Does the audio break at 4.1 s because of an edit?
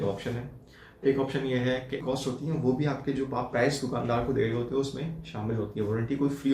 no; 1 cut; at 2.0 s

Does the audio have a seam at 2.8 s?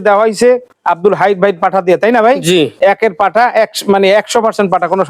no; 0 cuts

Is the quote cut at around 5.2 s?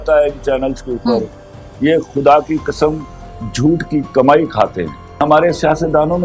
yes; 1 cut; at 5.2 s

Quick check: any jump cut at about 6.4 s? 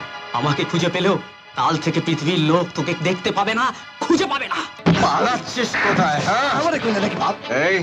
no; 1 cut; at 4.6 s

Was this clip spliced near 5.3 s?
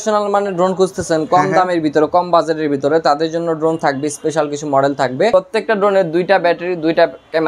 yes; 1 cut; at 5.3 s

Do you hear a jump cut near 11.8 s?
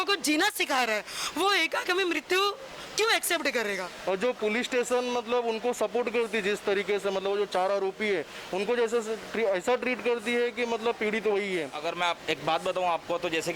yes; 2 cuts; at 3.9 s, 11.8 s

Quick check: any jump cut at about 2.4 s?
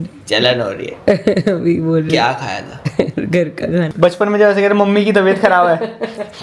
no; 1 cut; at 3.9 s

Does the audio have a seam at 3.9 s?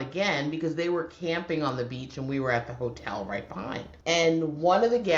yes; 1 cut; at 3.9 s

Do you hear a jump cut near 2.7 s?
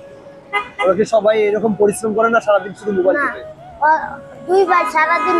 no; 0 cuts

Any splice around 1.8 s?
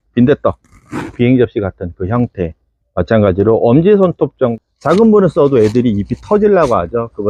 no; 1 cut; at 4.5 s

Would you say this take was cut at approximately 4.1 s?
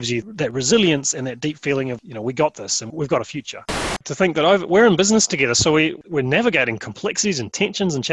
yes; 1 cut; at 4.1 s

